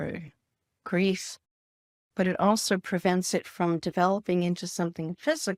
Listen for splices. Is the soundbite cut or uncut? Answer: uncut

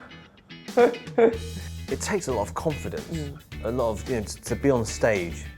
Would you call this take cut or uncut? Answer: cut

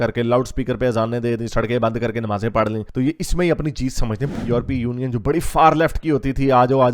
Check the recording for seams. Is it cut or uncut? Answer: cut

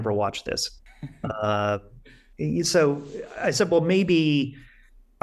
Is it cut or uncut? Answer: cut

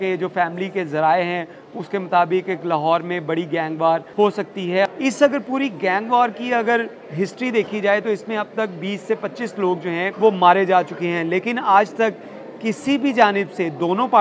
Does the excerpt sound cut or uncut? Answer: cut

